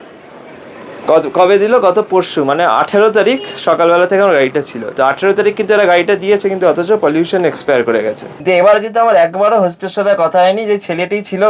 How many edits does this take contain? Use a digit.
1